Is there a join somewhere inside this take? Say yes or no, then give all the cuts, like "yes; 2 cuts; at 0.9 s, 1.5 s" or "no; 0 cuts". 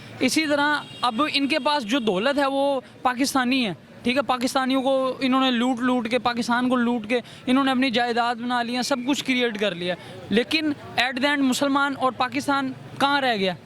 no; 0 cuts